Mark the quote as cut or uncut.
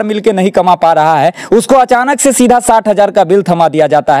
uncut